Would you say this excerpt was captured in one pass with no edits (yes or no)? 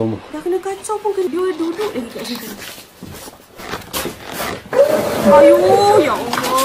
no